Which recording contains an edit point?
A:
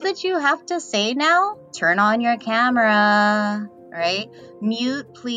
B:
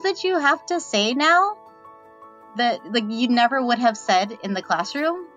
A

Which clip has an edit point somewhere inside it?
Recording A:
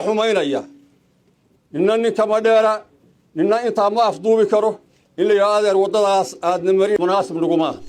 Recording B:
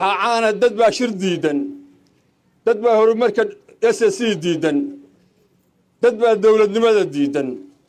A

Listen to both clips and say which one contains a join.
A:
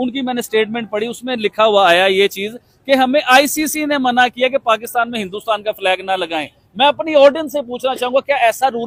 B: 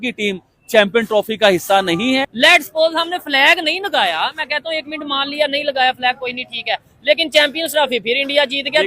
B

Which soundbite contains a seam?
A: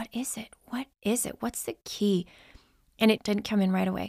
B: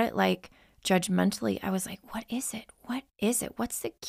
A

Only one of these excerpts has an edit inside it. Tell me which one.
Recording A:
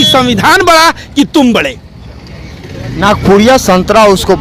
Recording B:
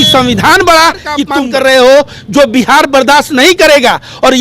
B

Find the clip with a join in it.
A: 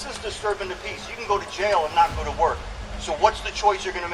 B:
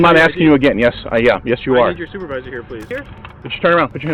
B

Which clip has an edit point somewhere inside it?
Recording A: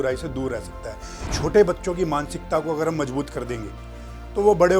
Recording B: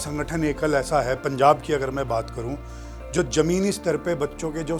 A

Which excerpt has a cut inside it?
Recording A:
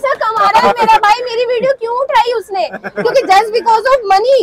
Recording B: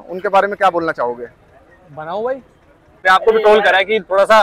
B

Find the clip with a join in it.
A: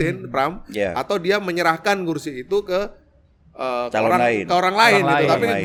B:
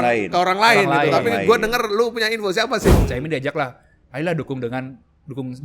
B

